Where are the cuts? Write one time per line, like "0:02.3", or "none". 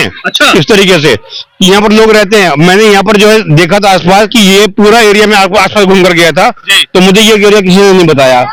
none